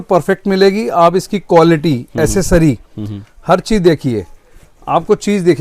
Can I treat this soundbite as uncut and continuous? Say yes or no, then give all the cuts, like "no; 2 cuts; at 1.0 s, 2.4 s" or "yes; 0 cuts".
yes; 0 cuts